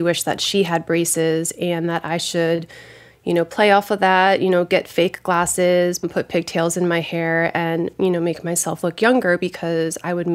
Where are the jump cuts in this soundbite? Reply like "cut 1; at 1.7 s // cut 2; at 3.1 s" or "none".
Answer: cut 1; at 6.0 s